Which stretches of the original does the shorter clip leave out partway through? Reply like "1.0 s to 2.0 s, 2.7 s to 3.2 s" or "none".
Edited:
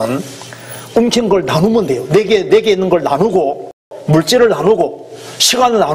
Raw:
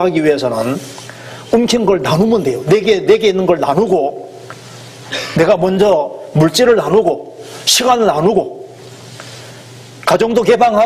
4.5 s to 6.2 s